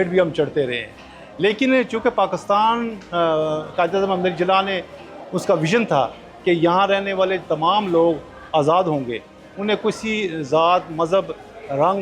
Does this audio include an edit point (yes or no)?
no